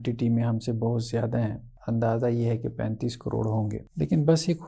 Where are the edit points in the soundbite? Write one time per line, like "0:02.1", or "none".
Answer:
0:01.7
0:03.9